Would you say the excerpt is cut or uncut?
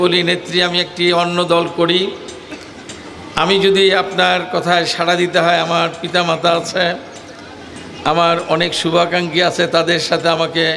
uncut